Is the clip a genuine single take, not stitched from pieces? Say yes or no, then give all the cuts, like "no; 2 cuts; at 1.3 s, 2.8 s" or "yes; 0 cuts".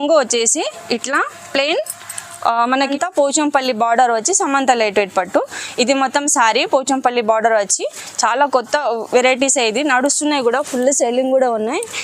no; 1 cut; at 2.8 s